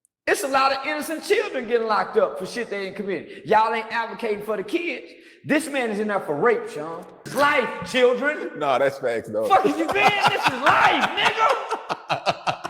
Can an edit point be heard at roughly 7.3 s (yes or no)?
yes